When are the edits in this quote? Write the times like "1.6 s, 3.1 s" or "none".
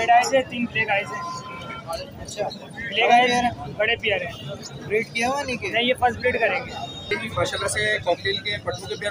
7.1 s